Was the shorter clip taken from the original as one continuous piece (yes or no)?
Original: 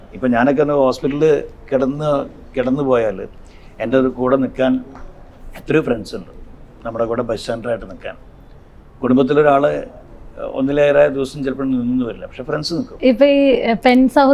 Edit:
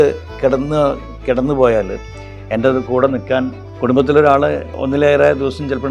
no